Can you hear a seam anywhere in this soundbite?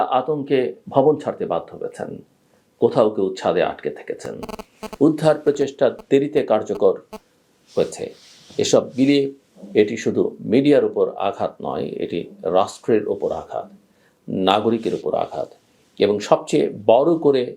no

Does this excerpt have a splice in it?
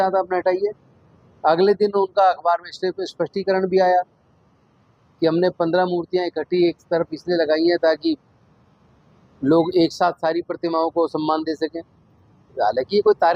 no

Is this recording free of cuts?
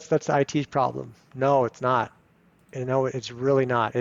yes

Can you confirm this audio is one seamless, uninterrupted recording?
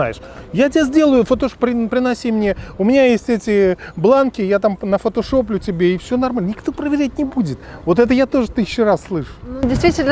yes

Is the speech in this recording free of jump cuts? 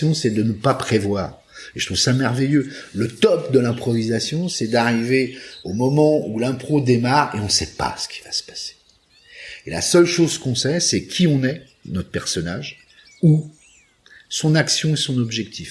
yes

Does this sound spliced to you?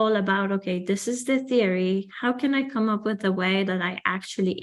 no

